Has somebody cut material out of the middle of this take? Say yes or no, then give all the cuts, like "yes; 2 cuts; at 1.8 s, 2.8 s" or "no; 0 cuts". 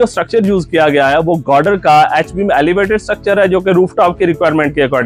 no; 0 cuts